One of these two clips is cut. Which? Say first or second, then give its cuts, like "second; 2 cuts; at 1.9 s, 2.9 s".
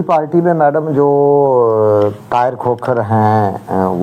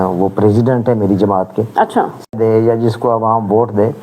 second; 1 cut; at 2.3 s